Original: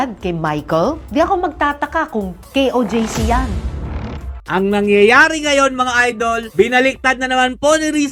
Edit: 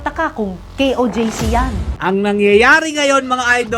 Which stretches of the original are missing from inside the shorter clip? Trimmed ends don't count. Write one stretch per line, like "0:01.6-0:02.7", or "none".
0:03.6-0:04.3